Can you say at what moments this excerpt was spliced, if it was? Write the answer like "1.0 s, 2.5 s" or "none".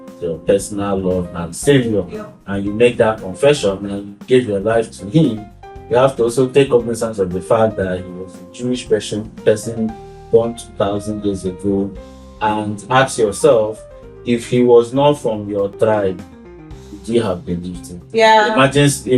18.0 s

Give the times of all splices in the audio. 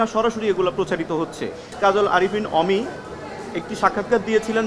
1.7 s

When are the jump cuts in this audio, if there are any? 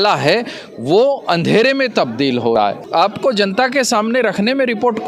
2.8 s

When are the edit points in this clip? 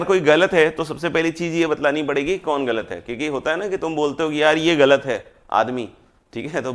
none

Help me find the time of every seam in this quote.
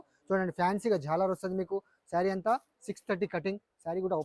none

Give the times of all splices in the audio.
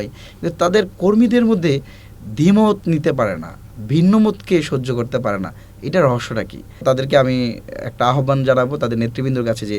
6.8 s

